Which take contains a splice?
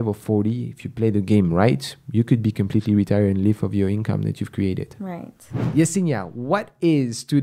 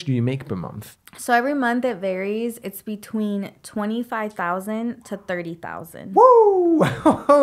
first; 1 cut; at 5.5 s

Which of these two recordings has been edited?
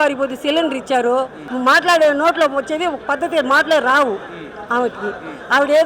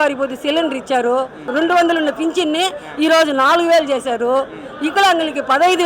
first; 1 cut; at 1.4 s

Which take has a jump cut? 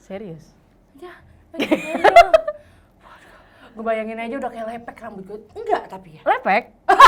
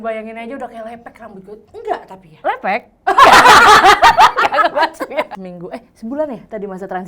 second; 1 cut; at 5.3 s

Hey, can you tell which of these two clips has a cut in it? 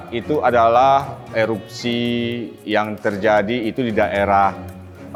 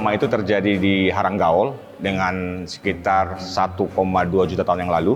second; 1 cut; at 1.9 s

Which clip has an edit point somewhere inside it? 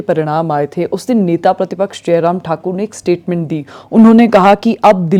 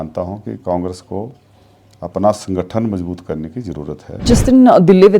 second; 1 cut; at 4.2 s

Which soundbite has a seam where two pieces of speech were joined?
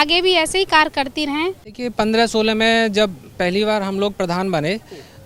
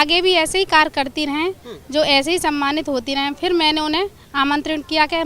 first; 1 cut; at 1.7 s

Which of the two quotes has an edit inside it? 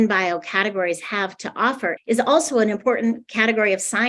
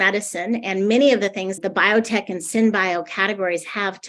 second; 1 cut; at 1.6 s

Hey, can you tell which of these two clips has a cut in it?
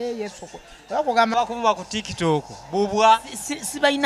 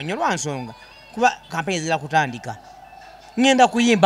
first; 1 cut; at 1.3 s

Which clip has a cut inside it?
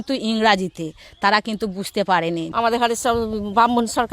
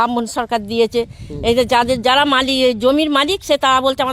first; 1 cut; at 2.5 s

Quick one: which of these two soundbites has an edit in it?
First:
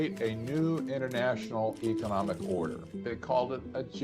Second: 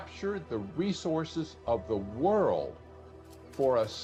first; 1 cut; at 2.9 s

